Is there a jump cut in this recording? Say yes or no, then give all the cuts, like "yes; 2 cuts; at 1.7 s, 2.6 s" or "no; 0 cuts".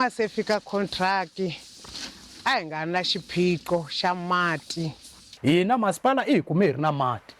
yes; 1 cut; at 5.2 s